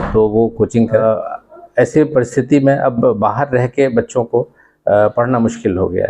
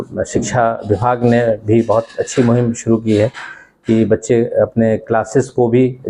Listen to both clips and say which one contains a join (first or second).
first